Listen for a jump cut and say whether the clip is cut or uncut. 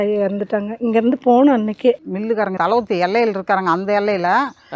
cut